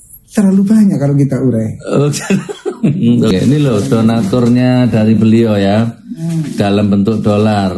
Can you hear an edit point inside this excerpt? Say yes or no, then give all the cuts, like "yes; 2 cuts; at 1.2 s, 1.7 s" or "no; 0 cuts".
yes; 1 cut; at 3.3 s